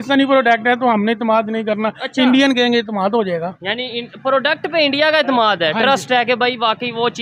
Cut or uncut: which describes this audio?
uncut